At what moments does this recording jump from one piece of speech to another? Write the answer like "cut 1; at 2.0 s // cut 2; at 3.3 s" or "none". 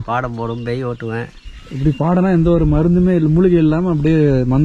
cut 1; at 1.4 s